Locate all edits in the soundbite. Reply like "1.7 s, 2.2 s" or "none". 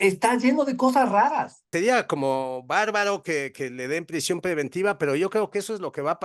1.6 s